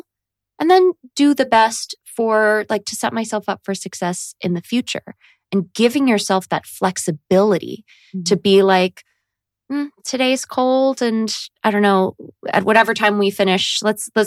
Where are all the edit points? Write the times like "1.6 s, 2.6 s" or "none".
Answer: none